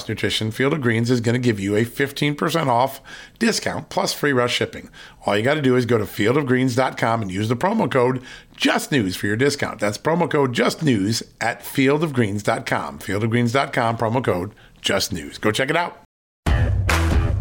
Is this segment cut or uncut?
cut